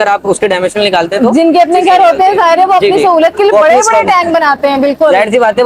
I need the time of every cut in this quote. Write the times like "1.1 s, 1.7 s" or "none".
none

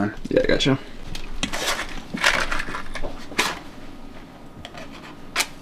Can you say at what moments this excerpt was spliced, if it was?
1.2 s

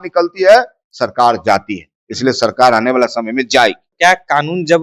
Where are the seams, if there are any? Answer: 3.9 s

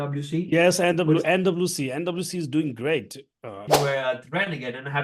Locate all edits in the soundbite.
3.7 s

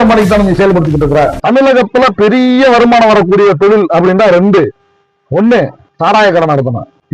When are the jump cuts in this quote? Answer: 1.4 s

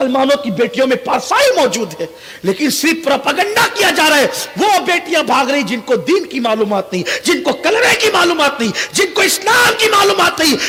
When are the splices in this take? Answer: none

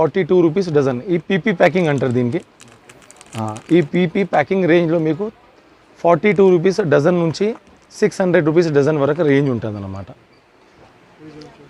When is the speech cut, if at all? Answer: none

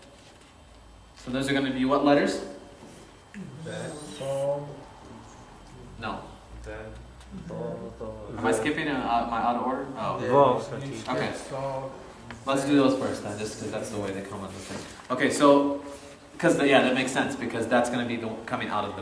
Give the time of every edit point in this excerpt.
1.9 s

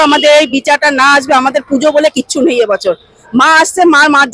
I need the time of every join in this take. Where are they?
none

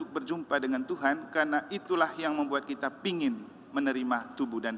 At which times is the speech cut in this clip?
none

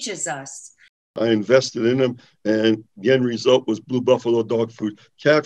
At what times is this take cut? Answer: 1.1 s

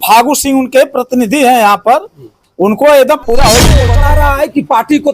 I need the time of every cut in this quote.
3.9 s

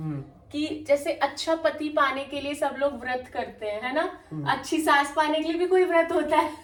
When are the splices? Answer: none

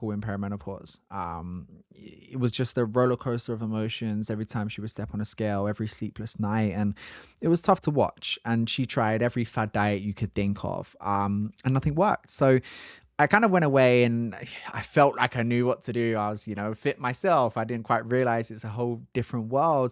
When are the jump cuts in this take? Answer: none

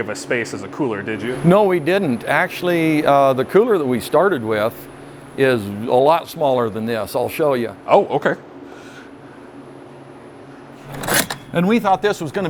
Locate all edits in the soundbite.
none

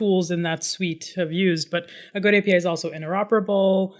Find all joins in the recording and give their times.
none

